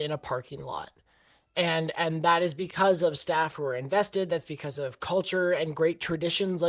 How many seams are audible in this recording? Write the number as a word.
zero